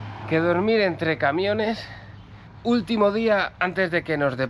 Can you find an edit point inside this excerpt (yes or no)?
yes